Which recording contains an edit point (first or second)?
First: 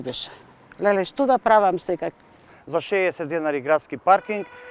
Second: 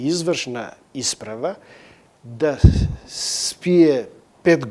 first